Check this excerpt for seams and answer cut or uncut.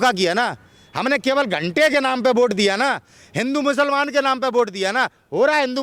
uncut